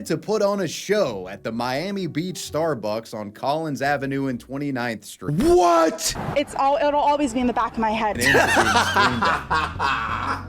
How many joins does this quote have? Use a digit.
2